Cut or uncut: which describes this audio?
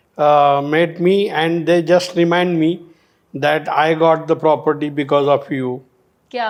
uncut